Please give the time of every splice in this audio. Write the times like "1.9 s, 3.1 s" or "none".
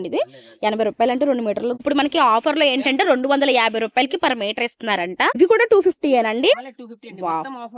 1.8 s, 5.4 s